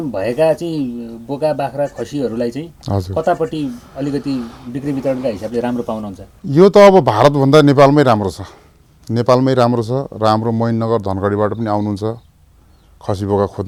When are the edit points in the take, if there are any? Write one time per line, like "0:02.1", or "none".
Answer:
none